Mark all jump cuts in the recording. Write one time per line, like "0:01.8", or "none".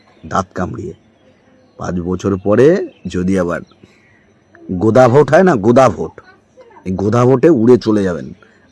none

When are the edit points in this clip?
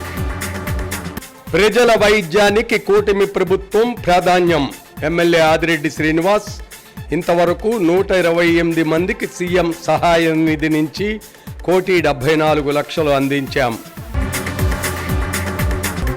0:01.1

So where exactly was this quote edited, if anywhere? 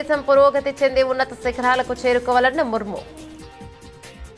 0:03.0

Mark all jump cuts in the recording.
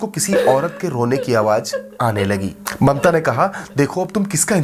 none

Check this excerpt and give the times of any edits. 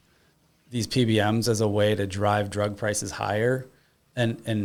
none

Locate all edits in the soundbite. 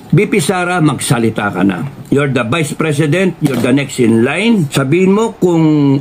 0:04.7

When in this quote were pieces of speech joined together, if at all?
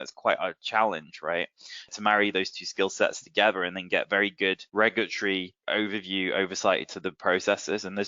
0:01.9
0:04.6
0:05.6

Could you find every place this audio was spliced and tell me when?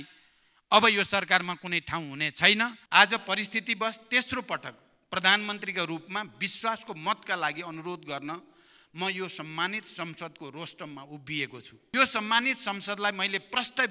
0:02.8
0:11.9

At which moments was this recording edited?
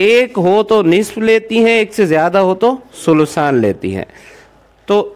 none

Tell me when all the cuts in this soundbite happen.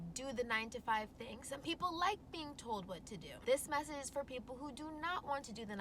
0:03.3

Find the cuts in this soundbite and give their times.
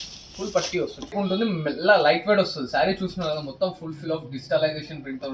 0:01.1

